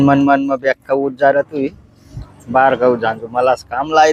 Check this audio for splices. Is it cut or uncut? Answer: uncut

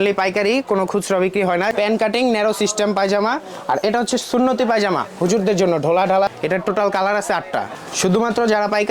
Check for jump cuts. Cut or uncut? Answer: cut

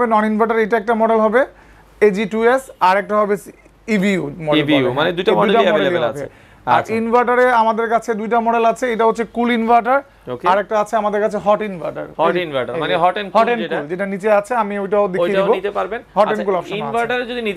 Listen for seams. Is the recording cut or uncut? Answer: uncut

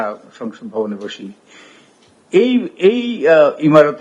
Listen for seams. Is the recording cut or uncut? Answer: uncut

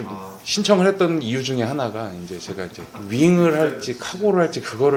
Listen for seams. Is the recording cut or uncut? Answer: uncut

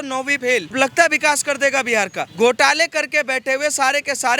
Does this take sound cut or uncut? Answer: cut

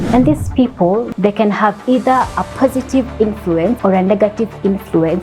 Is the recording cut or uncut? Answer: cut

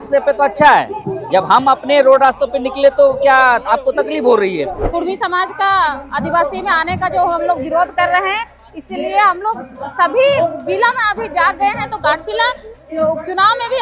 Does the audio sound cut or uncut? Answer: cut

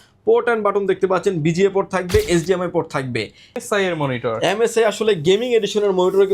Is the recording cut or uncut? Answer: cut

